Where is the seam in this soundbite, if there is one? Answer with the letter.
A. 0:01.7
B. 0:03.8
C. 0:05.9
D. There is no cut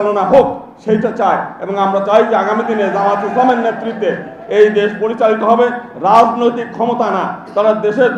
D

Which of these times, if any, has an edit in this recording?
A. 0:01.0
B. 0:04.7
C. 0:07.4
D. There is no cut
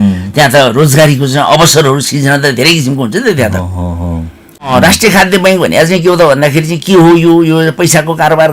B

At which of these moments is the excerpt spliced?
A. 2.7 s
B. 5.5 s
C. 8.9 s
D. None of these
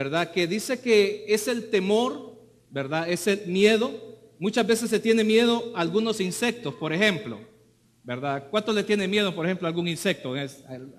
D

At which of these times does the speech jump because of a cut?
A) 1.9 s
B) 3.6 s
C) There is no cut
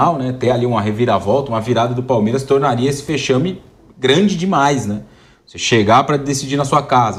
C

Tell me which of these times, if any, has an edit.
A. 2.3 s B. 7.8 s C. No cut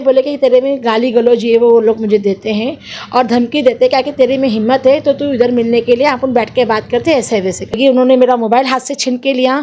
B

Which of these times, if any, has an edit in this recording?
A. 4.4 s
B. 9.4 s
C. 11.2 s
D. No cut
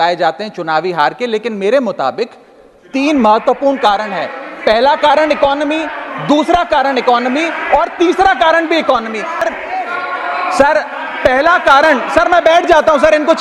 B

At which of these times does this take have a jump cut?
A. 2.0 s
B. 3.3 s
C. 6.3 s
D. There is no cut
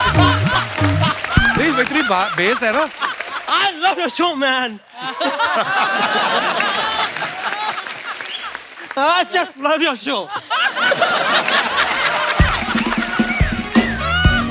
B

